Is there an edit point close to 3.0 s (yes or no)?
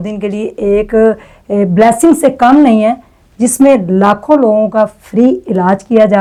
no